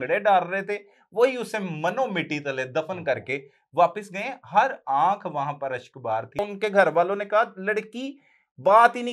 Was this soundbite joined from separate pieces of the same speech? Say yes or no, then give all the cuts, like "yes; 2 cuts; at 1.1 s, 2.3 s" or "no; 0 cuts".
yes; 1 cut; at 6.4 s